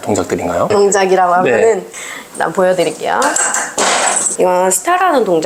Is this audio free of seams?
yes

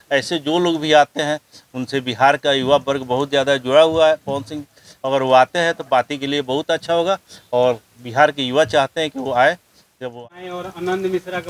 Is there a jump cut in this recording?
yes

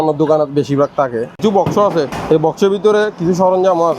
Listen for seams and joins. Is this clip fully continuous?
no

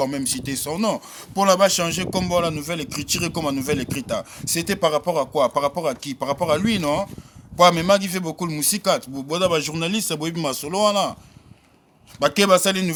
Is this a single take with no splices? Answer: yes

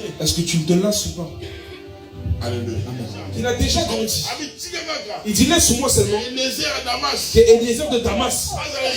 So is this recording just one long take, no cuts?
no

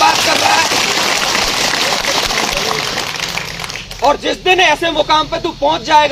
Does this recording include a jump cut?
no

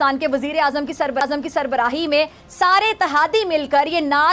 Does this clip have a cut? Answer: no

